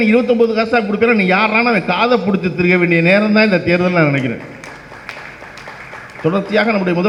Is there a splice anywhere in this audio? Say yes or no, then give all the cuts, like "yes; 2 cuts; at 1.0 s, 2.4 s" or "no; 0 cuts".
no; 0 cuts